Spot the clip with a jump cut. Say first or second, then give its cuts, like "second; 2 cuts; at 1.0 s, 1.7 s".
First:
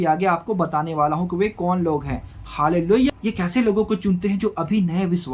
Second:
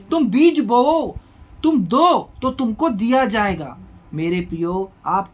first; 1 cut; at 3.1 s